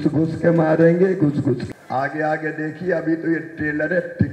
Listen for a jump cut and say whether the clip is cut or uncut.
cut